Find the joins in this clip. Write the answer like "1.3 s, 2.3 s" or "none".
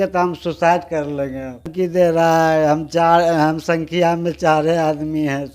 1.7 s